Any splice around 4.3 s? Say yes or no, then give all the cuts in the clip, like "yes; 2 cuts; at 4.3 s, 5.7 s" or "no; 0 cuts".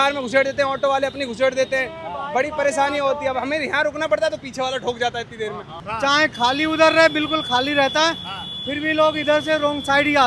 no; 1 cut; at 5.8 s